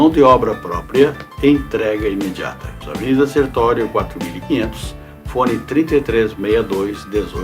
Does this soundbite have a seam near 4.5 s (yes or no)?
no